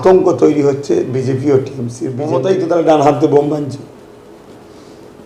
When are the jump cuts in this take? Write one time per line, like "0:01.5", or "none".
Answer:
0:02.2